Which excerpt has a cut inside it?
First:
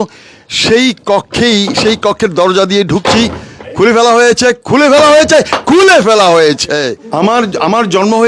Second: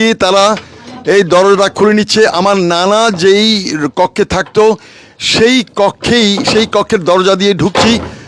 first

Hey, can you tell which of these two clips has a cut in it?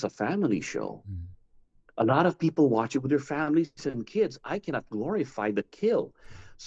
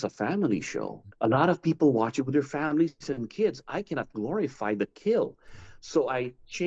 second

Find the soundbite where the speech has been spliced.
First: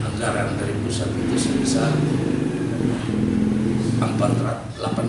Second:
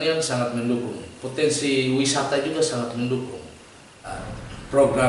second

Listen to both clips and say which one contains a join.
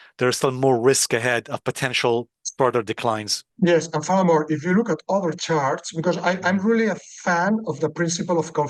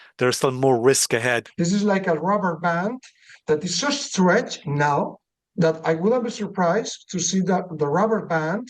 second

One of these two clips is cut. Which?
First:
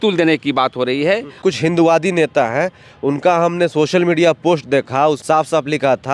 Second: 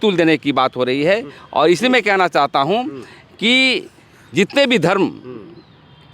first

